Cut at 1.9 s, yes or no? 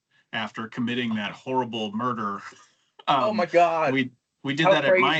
no